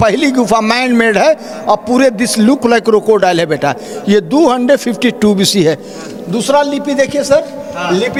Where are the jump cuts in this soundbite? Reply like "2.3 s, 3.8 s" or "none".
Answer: none